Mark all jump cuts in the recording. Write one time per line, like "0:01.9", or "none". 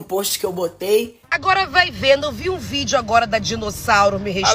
0:01.2